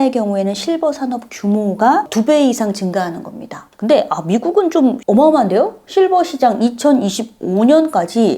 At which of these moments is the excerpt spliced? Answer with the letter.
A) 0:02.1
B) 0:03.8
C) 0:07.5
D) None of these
A